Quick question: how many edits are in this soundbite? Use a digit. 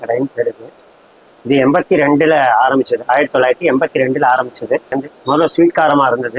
1